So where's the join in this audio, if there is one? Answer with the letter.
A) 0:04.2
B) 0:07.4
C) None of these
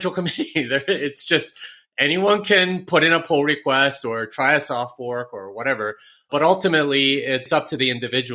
B